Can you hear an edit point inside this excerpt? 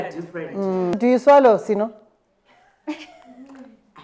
yes; 1 cut; at 0.9 s

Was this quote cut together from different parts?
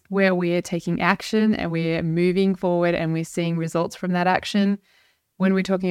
no; 0 cuts

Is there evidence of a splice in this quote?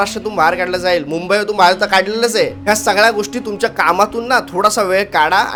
no; 0 cuts

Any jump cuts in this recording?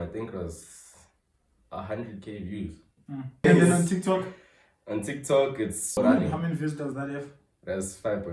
yes; 2 cuts; at 3.4 s, 6.0 s

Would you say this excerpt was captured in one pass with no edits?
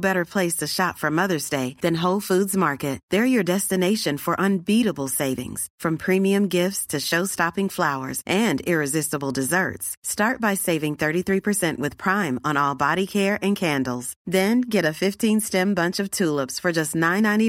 yes; 0 cuts

